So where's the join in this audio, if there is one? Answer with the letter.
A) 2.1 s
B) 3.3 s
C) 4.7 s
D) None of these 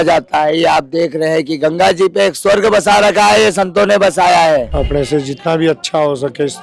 C